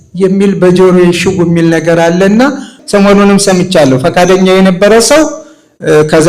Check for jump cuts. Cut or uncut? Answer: cut